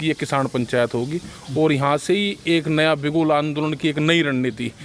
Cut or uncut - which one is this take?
uncut